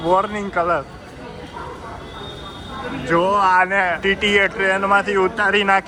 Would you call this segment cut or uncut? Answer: uncut